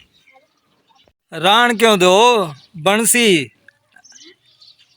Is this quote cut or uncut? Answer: cut